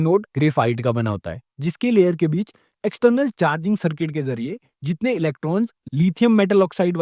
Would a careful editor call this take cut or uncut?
uncut